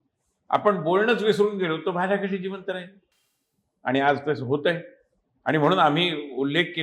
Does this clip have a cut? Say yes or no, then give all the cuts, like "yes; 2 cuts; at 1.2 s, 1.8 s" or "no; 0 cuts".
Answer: no; 0 cuts